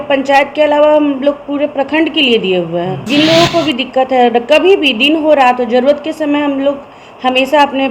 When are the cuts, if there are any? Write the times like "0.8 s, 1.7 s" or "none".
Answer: 3.0 s